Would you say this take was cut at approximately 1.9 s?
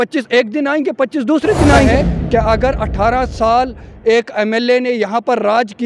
yes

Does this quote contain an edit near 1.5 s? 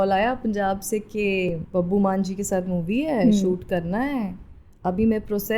yes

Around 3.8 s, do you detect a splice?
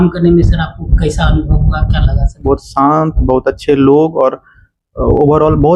no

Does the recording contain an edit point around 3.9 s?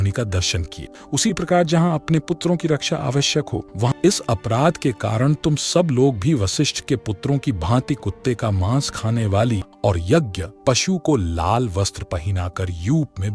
yes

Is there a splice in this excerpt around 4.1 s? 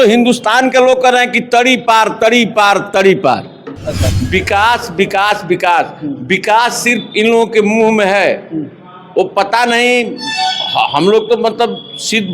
yes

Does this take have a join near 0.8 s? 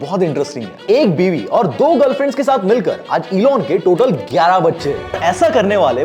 yes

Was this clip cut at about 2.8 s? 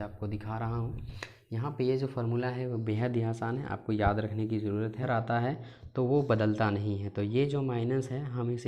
no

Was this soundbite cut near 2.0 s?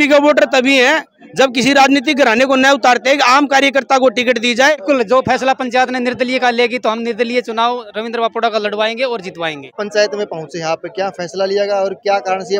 no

